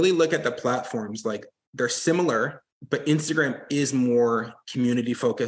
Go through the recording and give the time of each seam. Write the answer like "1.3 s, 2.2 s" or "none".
2.7 s